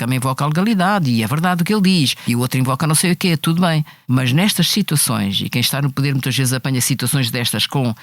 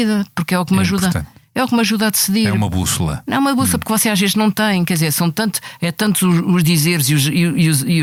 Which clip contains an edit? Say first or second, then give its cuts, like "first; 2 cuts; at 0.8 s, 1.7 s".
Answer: first; 2 cuts; at 2.2 s, 3.9 s